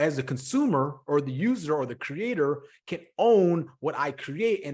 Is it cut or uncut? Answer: uncut